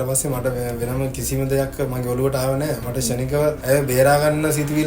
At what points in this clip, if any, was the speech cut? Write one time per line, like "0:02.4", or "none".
0:03.6